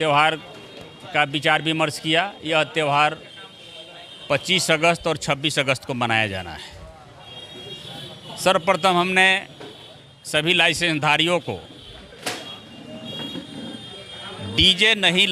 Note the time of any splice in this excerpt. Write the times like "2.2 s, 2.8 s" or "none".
none